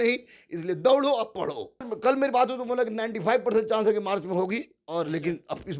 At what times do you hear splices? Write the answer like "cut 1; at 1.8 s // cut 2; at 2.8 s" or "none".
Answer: cut 1; at 1.9 s